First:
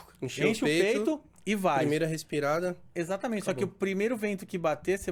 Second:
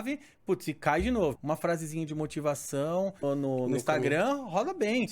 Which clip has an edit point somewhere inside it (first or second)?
second